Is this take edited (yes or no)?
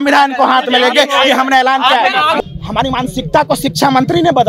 yes